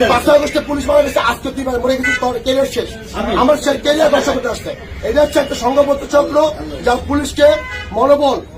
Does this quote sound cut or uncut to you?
uncut